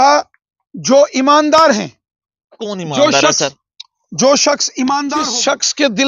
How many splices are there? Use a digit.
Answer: 1